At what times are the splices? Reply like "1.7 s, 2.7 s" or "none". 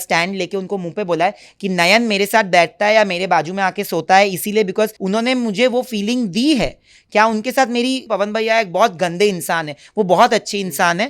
5.0 s, 8.0 s